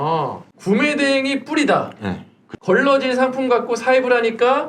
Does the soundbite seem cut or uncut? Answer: cut